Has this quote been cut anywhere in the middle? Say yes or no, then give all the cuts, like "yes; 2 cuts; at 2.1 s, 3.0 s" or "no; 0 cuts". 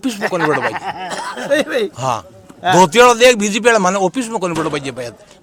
no; 0 cuts